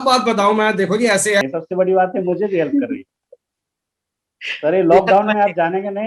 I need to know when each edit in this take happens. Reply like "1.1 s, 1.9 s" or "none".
1.4 s